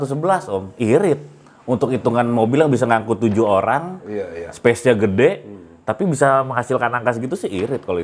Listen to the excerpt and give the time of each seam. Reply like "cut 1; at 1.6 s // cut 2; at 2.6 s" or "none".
none